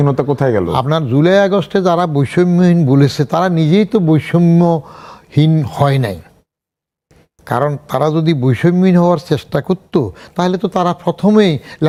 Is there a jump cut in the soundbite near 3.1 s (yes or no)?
no